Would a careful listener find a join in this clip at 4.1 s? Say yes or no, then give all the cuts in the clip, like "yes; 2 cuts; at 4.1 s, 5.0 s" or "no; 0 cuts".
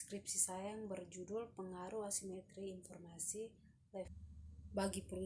yes; 1 cut; at 4.1 s